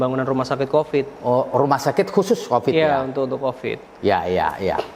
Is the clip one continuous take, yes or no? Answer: yes